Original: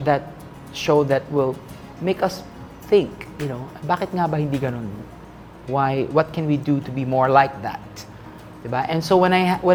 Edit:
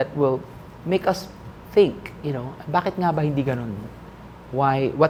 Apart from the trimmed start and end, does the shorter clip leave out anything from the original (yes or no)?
no